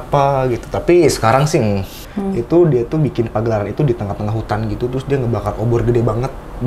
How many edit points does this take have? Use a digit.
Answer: 1